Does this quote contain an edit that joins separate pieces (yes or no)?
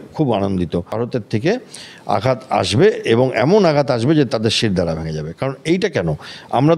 yes